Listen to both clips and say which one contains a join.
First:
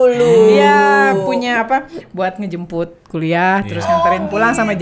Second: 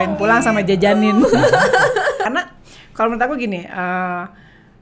second; 1 cut; at 2.3 s

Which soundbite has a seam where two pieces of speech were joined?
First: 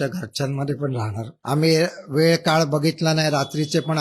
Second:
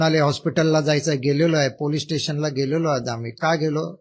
first; 1 cut; at 1.3 s

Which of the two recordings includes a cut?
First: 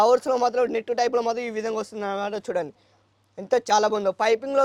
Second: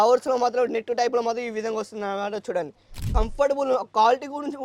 second; 1 cut; at 3.1 s

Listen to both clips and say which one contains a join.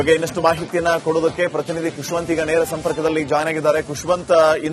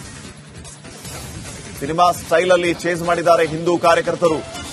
second; 1 cut; at 1.5 s

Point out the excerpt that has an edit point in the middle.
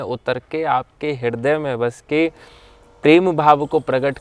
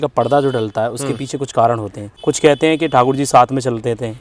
second; 1 cut; at 2.1 s

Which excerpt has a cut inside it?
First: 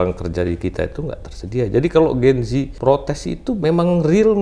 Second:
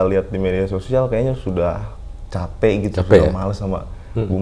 first; 2 cuts; at 2.7 s, 3.5 s

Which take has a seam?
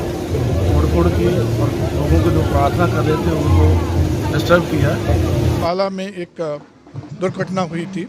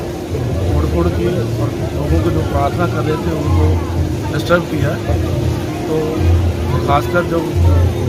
first; 1 cut; at 5.6 s

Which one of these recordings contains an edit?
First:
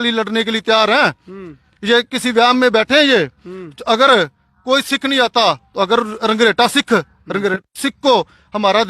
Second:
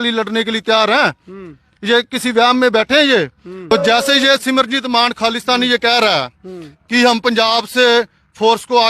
second; 1 cut; at 3.7 s

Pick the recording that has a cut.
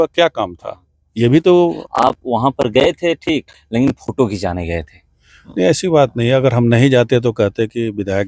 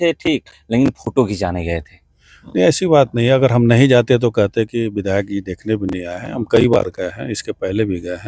first; 1 cut; at 1.8 s

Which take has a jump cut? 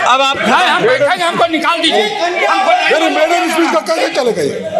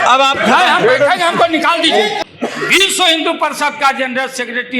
second; 1 cut; at 2.2 s

